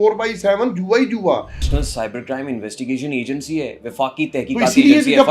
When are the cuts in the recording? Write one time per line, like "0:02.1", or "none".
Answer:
0:01.7